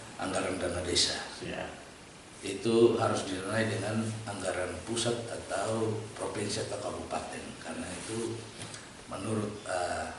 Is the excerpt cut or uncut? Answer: uncut